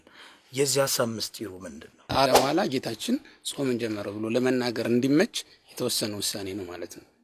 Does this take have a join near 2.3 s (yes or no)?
yes